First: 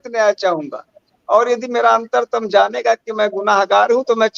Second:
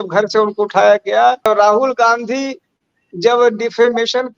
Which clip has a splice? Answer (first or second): second